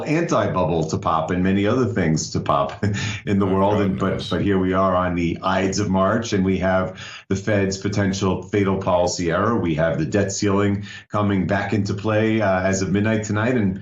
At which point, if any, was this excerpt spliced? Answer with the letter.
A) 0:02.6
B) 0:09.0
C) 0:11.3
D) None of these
A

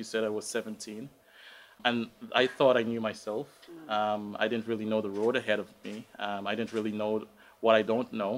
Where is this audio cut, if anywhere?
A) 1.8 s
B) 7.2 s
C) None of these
A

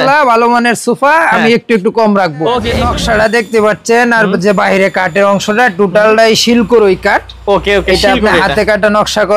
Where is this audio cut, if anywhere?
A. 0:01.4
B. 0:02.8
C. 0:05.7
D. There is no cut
B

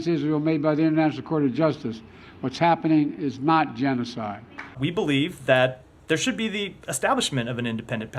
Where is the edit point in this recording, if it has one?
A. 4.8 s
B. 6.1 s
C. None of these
A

